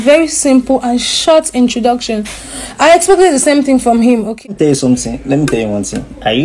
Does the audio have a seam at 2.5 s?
no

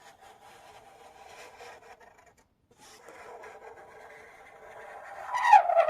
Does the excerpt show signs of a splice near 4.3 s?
no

